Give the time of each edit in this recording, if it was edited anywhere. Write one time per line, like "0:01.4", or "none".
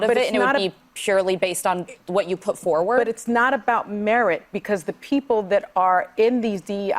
none